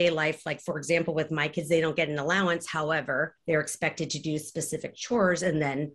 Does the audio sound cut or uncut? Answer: cut